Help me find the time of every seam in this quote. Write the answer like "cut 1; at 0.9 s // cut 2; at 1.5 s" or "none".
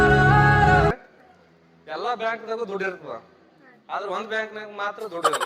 cut 1; at 0.9 s